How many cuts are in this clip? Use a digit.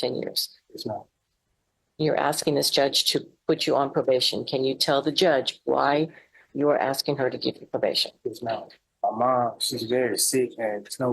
1